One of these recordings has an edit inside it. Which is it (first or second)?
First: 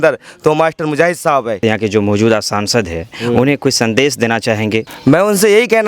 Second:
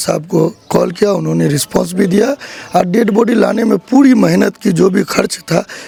first